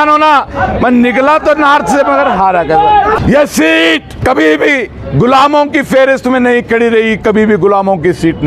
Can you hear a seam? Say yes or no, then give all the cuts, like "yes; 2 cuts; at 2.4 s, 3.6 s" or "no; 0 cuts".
yes; 2 cuts; at 3.2 s, 4.1 s